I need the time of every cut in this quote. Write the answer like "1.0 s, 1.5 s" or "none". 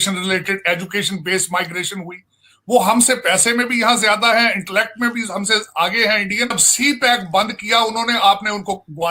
6.6 s